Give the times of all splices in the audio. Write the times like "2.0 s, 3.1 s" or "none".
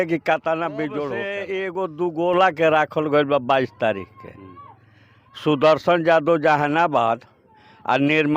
1.4 s